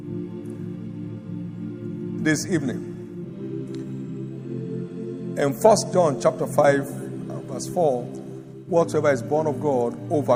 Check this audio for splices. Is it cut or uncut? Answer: uncut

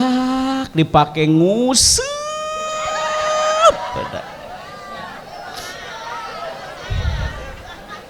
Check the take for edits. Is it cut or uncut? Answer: uncut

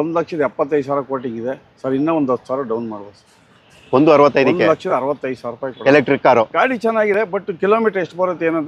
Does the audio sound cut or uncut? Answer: uncut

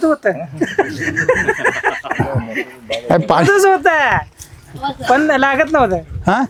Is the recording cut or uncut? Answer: uncut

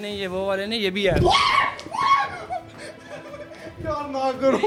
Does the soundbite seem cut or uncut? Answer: uncut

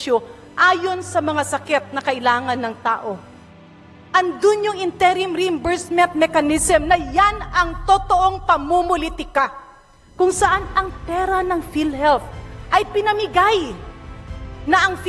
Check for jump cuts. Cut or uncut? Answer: uncut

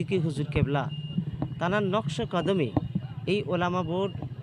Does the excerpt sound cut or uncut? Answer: uncut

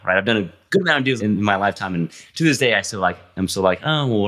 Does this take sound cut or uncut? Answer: cut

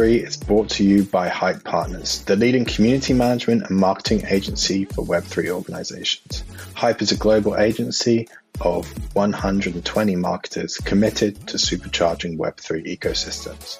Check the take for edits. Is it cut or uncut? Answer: uncut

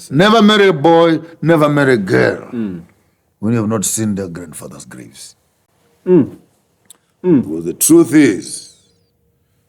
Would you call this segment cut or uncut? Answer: uncut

